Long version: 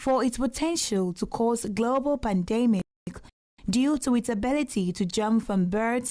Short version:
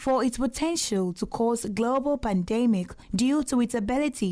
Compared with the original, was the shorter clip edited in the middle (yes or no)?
yes